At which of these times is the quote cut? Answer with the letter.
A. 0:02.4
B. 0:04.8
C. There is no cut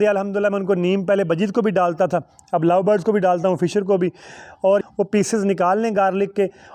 B